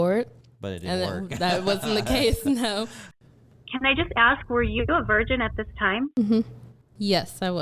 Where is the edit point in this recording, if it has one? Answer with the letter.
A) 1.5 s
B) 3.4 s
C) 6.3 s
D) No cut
B